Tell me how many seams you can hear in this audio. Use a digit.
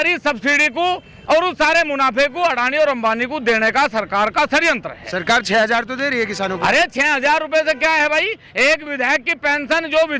0